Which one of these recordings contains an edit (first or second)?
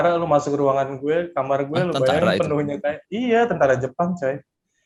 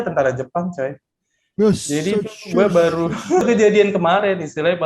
second